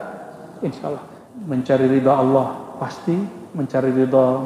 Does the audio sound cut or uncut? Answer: cut